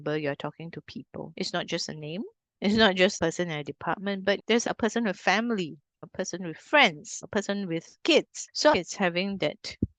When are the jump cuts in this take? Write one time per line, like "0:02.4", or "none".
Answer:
0:01.3
0:08.7